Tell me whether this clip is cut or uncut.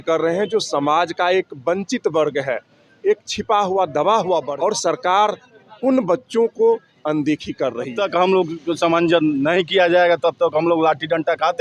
cut